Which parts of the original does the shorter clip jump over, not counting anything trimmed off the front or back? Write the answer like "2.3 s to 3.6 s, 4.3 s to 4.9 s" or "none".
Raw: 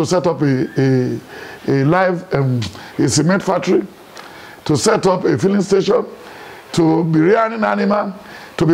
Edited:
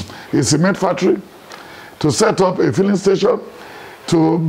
none

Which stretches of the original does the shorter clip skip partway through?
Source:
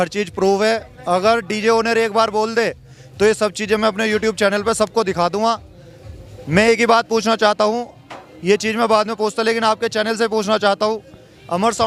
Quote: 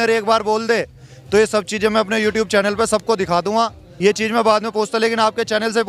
5.7 s to 8.3 s

